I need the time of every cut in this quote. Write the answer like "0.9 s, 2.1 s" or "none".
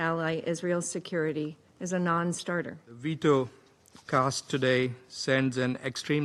3.0 s